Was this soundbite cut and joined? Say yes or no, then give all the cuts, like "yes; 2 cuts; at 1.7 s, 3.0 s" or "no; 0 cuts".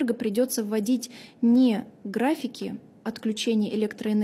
no; 0 cuts